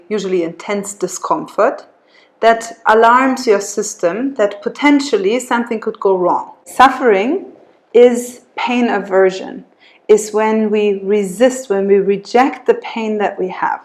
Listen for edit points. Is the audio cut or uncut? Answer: cut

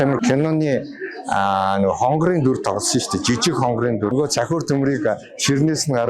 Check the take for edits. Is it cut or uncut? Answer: cut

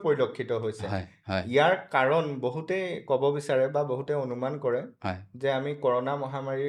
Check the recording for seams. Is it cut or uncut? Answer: uncut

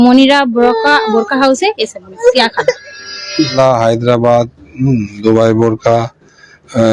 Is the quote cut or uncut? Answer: cut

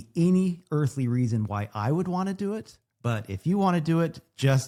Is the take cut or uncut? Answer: uncut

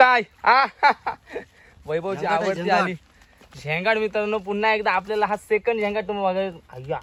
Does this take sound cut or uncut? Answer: uncut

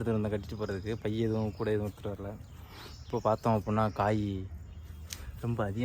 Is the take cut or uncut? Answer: uncut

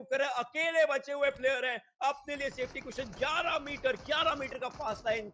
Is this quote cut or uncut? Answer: uncut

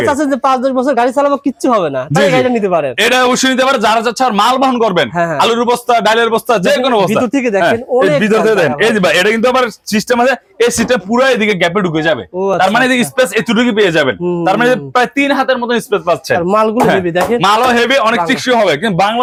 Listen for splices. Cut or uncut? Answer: uncut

